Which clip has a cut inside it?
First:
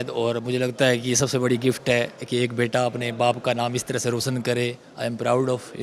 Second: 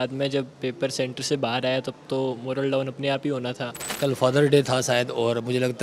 second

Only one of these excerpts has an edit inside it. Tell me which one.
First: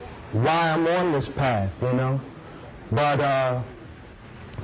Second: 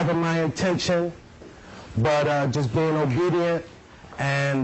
second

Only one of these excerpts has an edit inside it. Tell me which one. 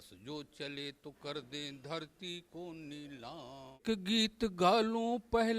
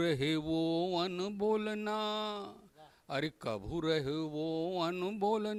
first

